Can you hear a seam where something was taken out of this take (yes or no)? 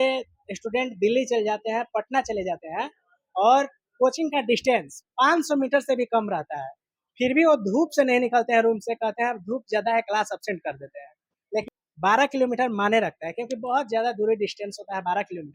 yes